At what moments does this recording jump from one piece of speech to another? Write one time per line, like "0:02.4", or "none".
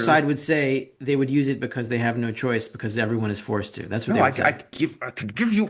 0:04.7